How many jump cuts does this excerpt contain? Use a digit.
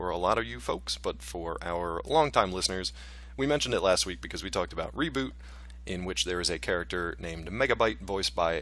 1